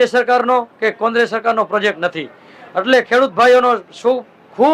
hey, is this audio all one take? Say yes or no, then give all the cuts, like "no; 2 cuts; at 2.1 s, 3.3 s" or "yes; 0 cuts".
yes; 0 cuts